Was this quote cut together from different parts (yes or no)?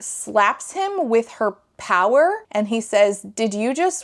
no